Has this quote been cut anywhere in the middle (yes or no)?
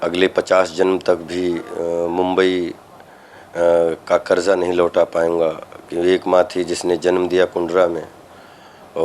no